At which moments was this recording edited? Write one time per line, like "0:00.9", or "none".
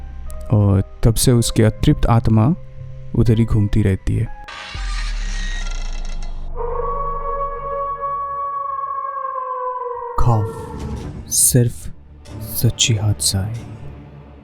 0:04.3